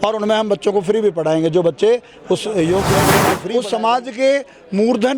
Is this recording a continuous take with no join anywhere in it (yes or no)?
no